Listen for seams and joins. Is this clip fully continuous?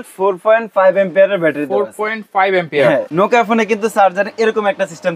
no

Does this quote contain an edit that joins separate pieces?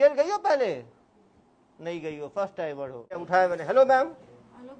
yes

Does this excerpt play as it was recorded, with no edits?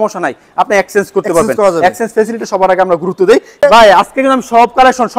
no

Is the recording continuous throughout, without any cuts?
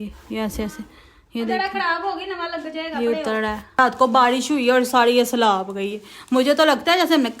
no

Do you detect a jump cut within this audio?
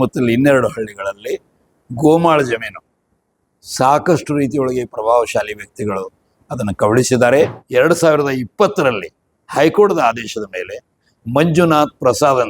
yes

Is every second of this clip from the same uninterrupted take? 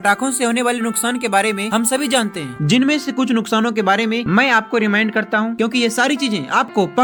yes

